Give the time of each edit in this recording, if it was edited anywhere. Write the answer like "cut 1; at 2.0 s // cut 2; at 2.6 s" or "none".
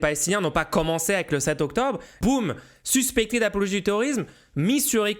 cut 1; at 2.2 s